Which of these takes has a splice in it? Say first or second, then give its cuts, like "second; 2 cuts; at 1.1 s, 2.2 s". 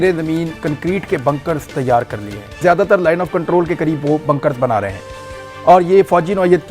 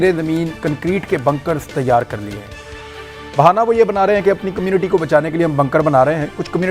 first; 1 cut; at 2.6 s